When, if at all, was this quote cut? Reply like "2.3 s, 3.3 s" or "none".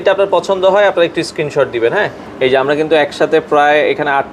none